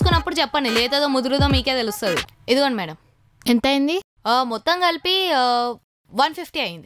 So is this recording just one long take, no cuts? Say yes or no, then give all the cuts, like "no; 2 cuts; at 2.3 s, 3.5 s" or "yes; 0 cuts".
no; 1 cut; at 2.3 s